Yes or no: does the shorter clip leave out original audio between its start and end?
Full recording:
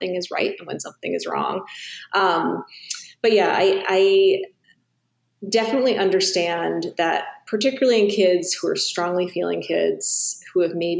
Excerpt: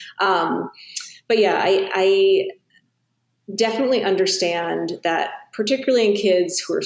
no